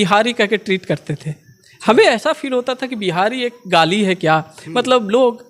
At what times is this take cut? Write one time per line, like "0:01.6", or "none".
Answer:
none

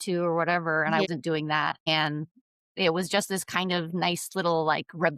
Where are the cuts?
0:01.1

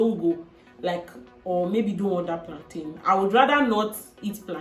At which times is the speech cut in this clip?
none

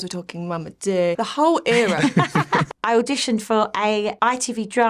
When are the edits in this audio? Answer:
0:01.2
0:02.7
0:04.1

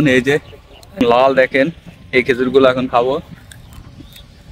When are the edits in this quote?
0:01.0

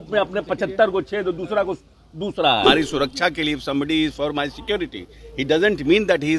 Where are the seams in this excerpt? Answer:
0:02.6

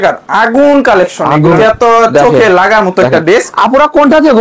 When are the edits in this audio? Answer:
0:01.6

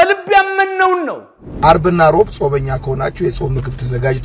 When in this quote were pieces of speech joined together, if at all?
0:01.6

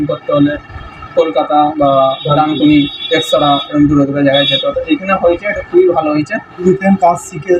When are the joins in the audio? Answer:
0:06.6

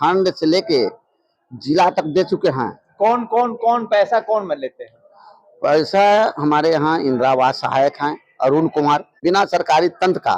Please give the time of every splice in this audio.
0:09.1

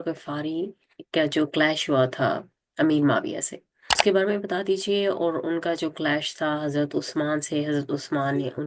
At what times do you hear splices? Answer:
0:03.9

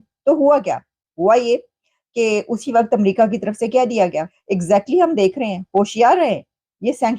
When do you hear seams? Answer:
0:04.3

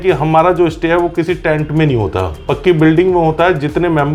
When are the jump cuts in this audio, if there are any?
none

